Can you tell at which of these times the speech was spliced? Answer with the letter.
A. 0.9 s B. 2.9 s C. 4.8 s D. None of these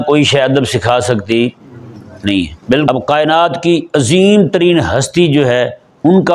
B